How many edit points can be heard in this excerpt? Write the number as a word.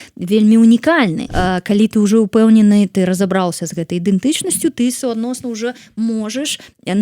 one